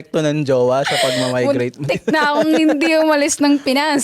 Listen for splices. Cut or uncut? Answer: uncut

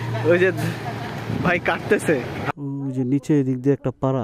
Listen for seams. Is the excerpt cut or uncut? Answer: cut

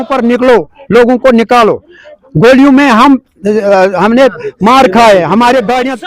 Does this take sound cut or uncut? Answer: uncut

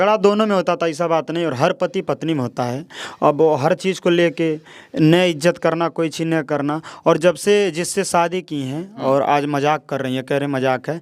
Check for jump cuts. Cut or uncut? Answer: uncut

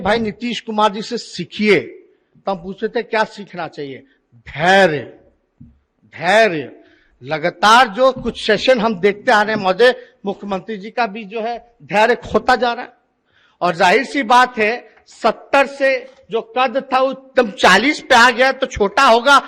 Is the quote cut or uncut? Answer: uncut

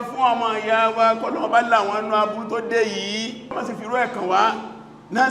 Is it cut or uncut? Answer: cut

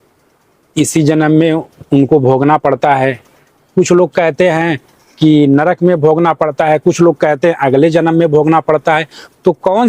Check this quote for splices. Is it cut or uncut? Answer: uncut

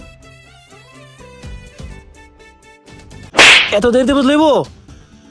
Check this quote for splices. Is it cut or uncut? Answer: cut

